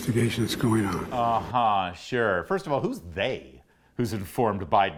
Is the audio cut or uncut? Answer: uncut